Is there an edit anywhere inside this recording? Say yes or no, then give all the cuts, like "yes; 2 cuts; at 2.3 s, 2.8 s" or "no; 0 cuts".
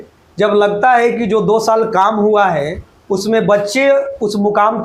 no; 0 cuts